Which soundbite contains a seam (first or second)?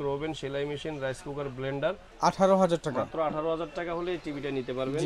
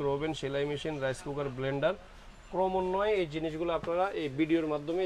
first